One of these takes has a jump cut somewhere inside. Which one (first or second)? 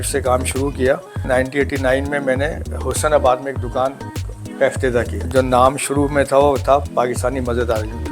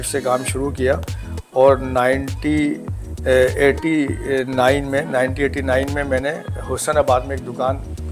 first